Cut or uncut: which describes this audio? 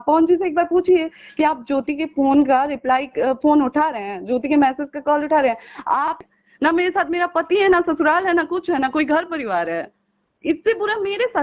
cut